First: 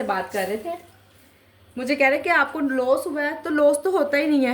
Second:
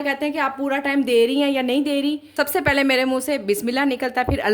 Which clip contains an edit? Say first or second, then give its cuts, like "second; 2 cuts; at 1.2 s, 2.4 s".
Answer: second; 1 cut; at 2.2 s